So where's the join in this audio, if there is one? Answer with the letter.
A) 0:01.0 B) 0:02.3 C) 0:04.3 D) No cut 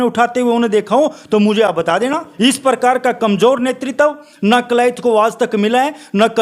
B